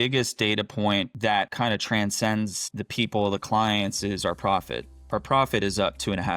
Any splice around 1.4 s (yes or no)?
yes